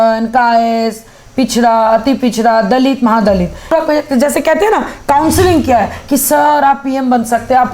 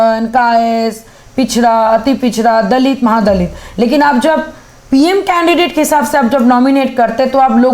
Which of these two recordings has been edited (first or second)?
first